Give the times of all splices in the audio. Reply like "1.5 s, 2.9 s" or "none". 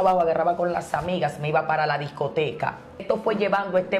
3.0 s